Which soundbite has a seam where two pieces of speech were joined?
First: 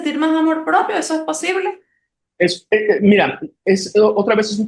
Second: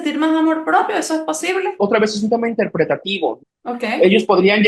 second; 2 cuts; at 1.8 s, 3.4 s

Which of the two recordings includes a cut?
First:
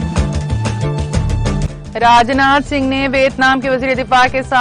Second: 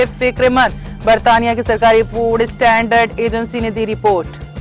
first; 1 cut; at 1.7 s

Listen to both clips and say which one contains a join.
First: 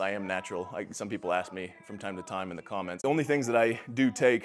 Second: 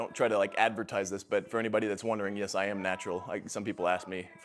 first; 1 cut; at 3.0 s

